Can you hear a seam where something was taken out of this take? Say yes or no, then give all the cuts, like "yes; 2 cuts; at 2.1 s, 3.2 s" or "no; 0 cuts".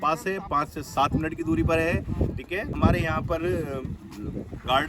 yes; 1 cut; at 2.7 s